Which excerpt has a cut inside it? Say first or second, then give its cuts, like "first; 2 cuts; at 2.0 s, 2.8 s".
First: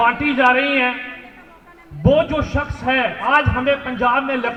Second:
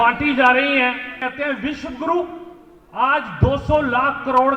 second; 1 cut; at 1.2 s